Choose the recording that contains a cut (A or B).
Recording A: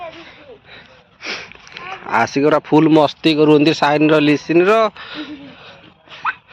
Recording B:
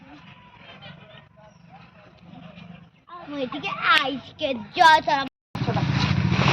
B